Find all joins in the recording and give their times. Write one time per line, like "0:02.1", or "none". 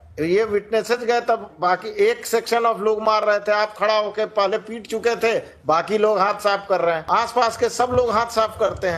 0:07.0